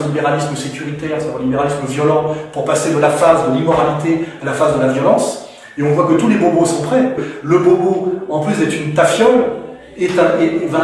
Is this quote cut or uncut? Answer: cut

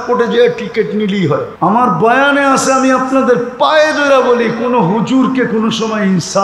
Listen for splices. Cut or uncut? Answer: cut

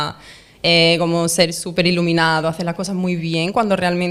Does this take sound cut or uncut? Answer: uncut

